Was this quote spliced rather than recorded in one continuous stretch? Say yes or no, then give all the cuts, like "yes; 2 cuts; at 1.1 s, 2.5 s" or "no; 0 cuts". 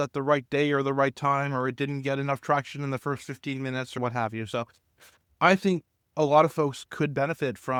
no; 0 cuts